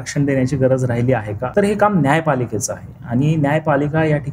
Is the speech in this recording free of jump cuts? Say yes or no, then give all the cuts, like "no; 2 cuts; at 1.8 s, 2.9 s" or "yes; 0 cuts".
no; 1 cut; at 1.4 s